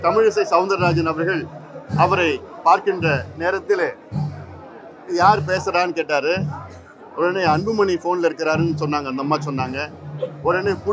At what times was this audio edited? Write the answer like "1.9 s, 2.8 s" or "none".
none

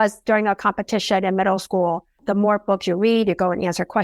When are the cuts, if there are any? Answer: 2.2 s

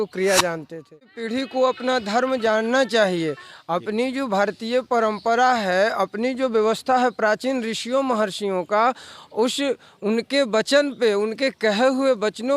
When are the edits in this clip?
1.2 s

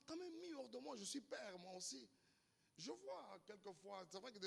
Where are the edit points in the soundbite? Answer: none

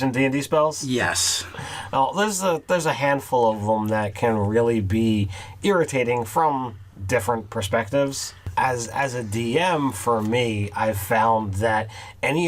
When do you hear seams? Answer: 11.5 s

